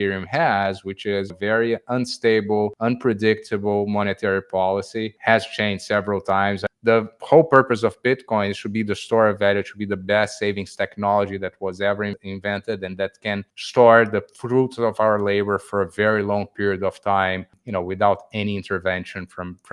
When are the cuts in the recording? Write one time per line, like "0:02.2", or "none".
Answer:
0:01.3
0:02.8
0:05.1
0:06.7
0:12.2
0:13.6
0:17.6